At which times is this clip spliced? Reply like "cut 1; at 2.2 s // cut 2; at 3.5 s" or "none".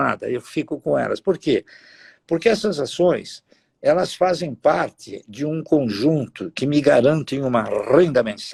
none